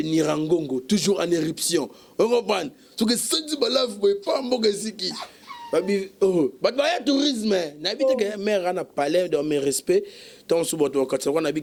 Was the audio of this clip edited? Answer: no; 0 cuts

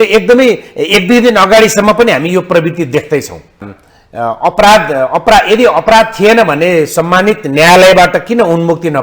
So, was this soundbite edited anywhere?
yes; 1 cut; at 3.7 s

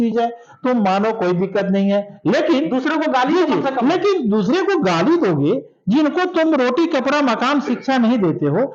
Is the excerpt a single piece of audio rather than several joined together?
yes; 0 cuts

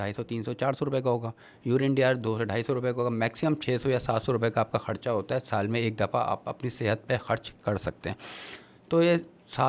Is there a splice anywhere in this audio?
no; 0 cuts

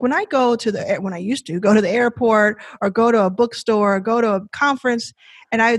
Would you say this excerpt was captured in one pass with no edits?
no; 1 cut; at 4.5 s

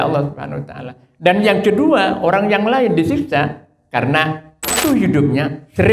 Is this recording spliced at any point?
yes; 1 cut; at 4.8 s

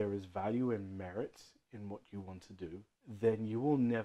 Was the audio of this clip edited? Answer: yes; 1 cut; at 2.9 s

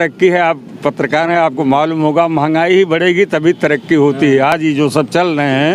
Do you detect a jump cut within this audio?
no; 0 cuts

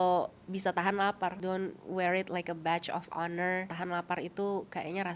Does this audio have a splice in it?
yes; 2 cuts; at 1.4 s, 3.7 s

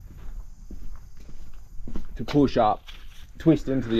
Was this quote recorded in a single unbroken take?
yes; 0 cuts

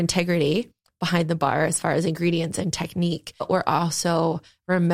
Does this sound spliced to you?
yes; 1 cut; at 3.5 s

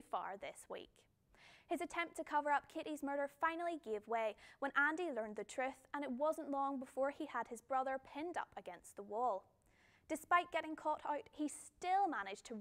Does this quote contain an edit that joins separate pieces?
no; 0 cuts

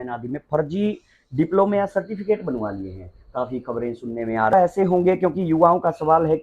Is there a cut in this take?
yes; 1 cut; at 4.5 s

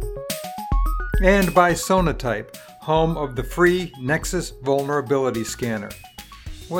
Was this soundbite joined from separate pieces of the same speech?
yes; 1 cut; at 1.2 s

